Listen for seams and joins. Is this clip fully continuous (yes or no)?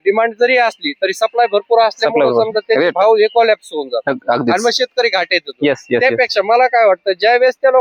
yes